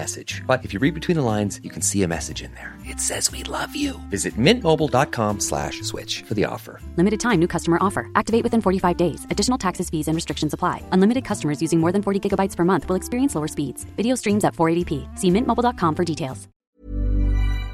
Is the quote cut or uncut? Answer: cut